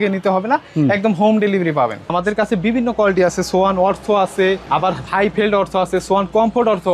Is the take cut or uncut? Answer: cut